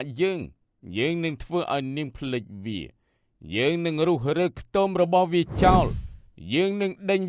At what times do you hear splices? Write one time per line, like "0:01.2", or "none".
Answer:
none